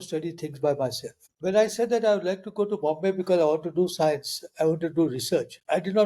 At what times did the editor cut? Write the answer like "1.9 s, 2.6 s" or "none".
1.3 s

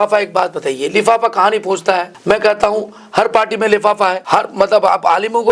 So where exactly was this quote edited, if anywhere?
2.1 s, 4.2 s

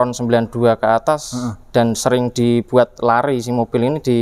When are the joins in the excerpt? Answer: none

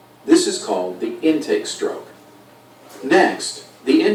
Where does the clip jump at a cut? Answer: none

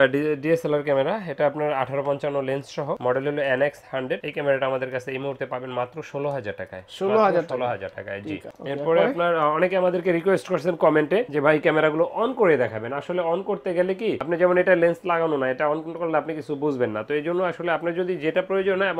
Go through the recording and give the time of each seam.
none

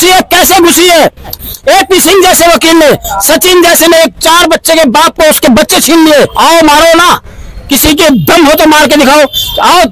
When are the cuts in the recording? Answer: 1.4 s, 6.3 s

